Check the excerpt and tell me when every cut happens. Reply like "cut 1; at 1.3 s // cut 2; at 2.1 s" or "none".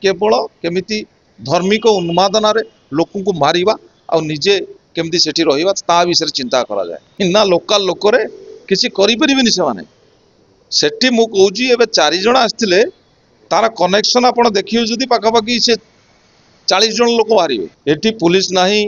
cut 1; at 7.0 s // cut 2; at 17.7 s